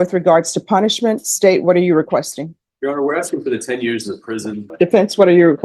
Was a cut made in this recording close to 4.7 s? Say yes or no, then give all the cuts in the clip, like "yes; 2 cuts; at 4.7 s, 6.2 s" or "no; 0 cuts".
yes; 1 cut; at 4.7 s